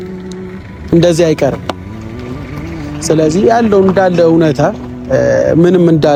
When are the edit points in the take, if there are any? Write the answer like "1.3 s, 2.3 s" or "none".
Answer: none